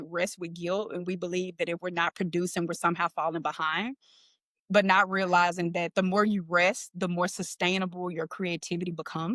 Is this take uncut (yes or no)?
yes